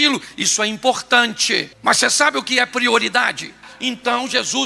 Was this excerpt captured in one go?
no; 1 cut; at 3.6 s

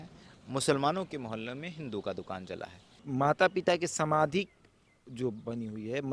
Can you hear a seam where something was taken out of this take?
yes; 1 cut; at 3.0 s

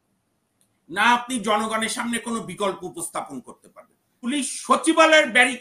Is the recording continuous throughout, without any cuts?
no; 1 cut; at 4.3 s

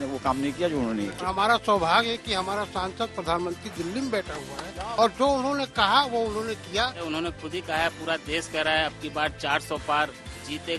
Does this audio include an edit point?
yes; 3 cuts; at 1.2 s, 4.9 s, 7.0 s

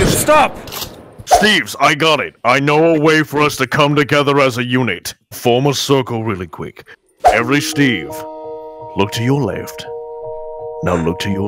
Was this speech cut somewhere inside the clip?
yes; 1 cut; at 1.3 s

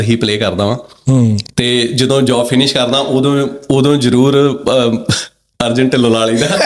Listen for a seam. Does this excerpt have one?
no; 0 cuts

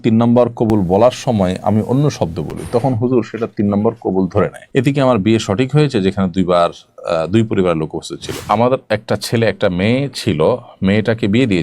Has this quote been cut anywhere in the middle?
yes; 2 cuts; at 4.6 s, 8.4 s

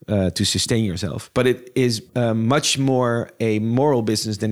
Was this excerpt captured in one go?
no; 2 cuts; at 1.2 s, 2.0 s

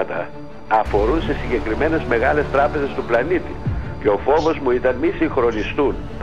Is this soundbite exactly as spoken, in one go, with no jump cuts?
yes; 0 cuts

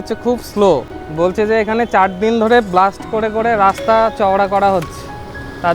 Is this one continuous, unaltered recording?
no; 1 cut; at 1.0 s

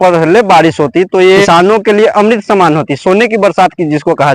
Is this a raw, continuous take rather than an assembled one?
no; 1 cut; at 1.4 s

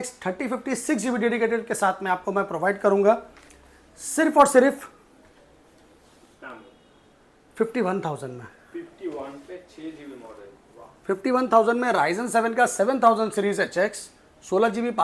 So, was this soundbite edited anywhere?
no; 0 cuts

